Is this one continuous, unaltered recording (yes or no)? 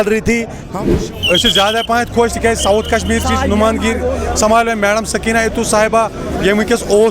no